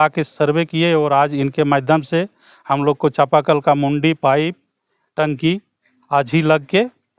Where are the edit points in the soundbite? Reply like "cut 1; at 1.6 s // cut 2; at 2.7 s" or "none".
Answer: none